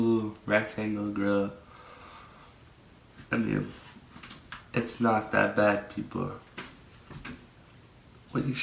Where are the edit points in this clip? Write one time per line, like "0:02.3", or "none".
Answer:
none